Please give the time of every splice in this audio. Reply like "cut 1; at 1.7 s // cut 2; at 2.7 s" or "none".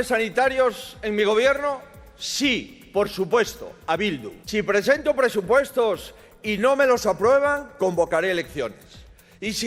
cut 1; at 4.3 s